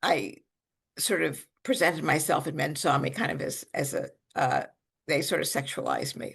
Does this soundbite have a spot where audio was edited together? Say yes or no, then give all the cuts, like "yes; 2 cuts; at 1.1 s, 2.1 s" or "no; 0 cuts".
no; 0 cuts